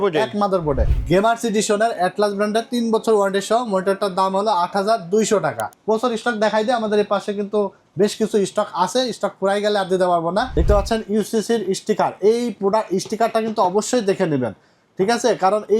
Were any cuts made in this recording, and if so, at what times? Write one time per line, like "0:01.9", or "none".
0:00.9
0:05.7
0:10.5

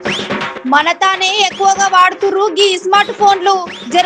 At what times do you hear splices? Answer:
none

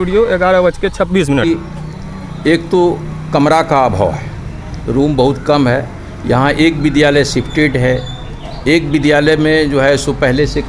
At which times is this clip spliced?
0:01.4

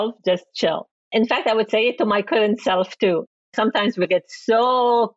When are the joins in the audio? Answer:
0:00.9

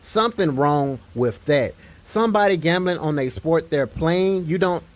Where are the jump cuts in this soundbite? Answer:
0:02.8

